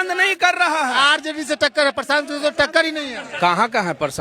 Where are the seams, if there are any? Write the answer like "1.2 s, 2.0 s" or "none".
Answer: 0.9 s, 3.2 s